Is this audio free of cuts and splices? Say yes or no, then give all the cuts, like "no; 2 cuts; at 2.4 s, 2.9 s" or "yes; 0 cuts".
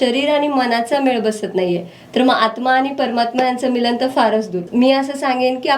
yes; 0 cuts